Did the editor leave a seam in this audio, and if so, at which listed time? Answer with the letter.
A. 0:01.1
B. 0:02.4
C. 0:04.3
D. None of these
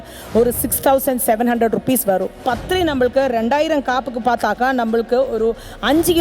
B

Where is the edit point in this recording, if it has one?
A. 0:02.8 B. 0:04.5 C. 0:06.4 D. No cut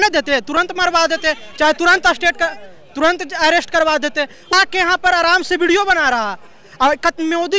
B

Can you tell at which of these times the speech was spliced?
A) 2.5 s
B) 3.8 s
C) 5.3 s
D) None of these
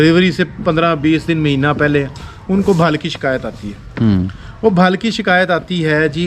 D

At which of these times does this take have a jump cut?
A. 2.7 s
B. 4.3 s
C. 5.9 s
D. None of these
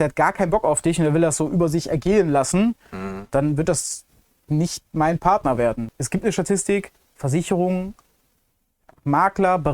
C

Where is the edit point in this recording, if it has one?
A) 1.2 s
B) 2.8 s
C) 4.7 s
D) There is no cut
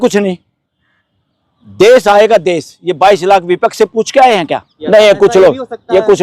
C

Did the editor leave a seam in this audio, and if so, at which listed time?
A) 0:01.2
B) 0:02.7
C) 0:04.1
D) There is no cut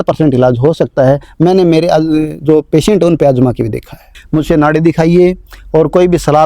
C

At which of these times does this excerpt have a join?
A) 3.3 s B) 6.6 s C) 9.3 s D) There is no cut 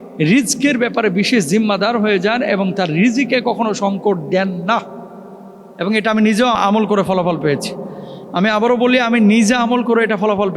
B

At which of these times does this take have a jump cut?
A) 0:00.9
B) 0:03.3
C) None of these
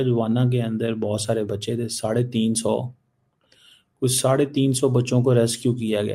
C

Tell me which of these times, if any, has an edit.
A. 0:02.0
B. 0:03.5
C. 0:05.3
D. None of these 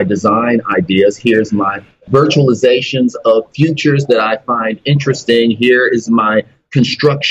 A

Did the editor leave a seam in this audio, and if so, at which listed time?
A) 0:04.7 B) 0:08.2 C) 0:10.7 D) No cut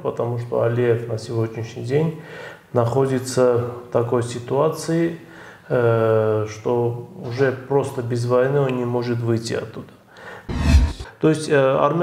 C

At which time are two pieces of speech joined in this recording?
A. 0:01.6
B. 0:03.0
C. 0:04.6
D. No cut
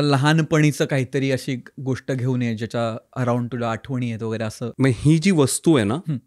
C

